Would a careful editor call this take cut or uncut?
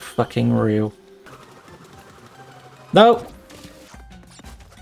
cut